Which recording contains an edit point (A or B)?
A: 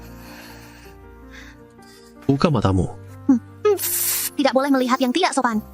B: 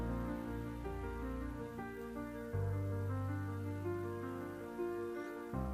A